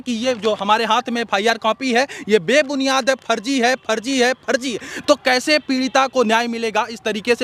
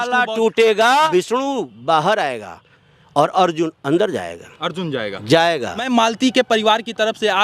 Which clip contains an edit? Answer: second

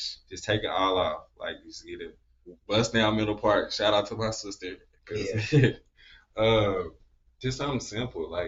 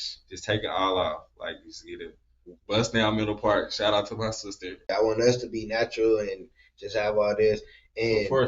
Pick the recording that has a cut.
second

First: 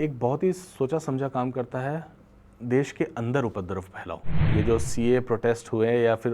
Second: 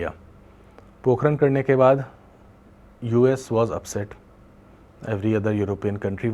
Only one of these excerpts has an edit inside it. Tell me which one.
first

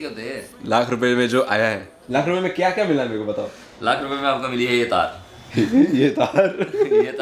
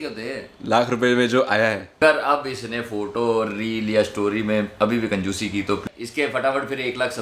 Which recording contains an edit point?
second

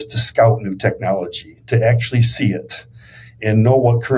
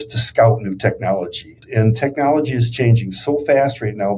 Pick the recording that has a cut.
second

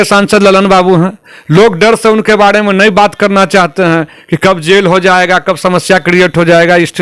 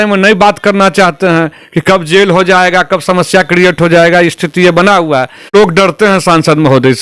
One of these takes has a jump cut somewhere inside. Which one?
second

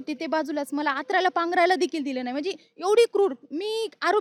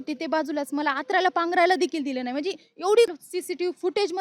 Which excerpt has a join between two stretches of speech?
second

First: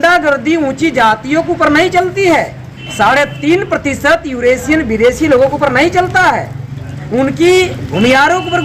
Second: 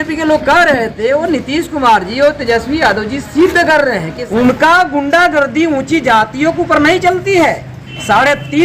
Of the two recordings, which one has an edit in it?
second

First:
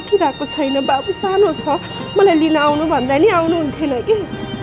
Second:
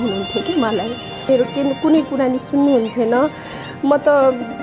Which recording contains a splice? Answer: second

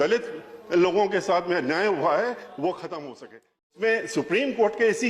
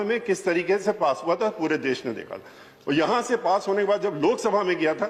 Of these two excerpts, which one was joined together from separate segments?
first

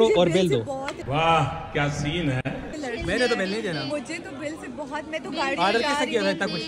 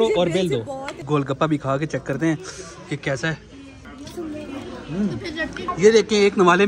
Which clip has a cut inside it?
second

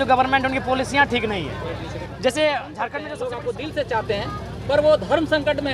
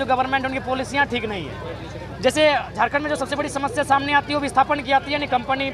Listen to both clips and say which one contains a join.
first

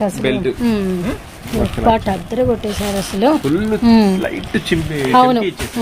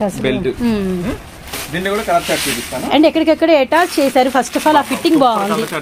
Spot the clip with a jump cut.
first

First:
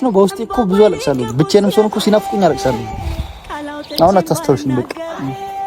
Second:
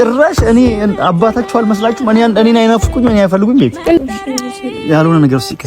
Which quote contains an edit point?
second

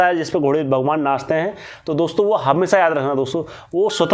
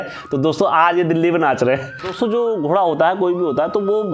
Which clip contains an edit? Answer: second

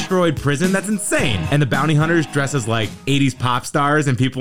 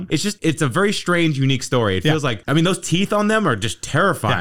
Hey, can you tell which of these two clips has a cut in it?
second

